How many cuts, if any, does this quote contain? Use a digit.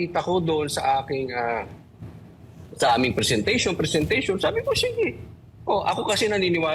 0